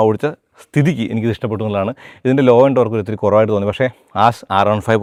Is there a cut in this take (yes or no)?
no